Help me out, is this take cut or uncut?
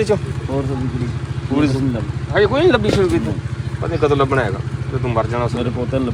uncut